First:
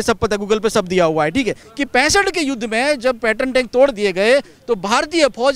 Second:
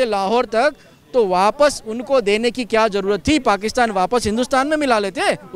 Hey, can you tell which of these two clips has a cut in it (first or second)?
first